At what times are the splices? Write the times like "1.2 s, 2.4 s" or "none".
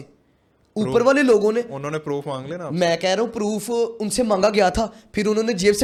none